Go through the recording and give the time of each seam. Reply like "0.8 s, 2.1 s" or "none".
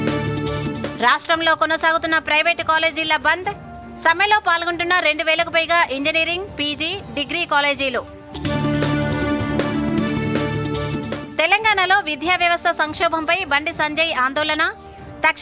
none